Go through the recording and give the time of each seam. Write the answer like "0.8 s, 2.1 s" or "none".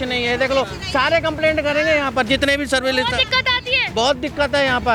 none